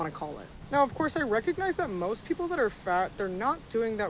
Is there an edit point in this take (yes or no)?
yes